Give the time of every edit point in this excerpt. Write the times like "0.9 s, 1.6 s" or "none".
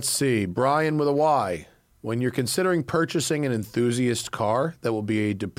none